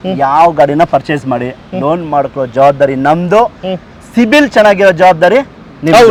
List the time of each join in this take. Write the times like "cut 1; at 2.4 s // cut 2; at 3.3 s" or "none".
none

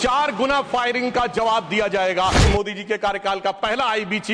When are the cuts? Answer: cut 1; at 2.4 s

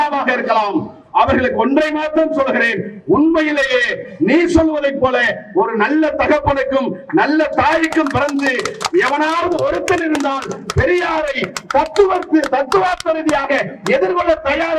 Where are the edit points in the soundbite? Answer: none

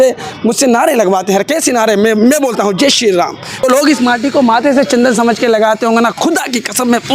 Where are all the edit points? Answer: cut 1; at 3.6 s

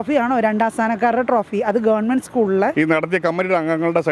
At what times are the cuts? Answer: cut 1; at 2.7 s

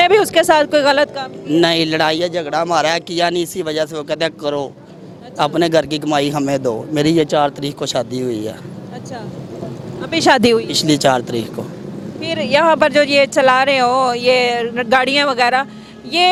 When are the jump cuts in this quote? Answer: none

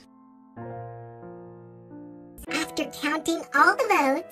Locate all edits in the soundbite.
cut 1; at 2.3 s

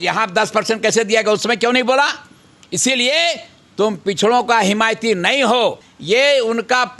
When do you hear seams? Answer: cut 1; at 5.9 s

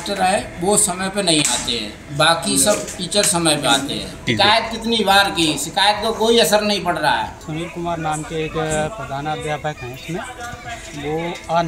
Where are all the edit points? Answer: cut 1; at 4.2 s // cut 2; at 7.5 s

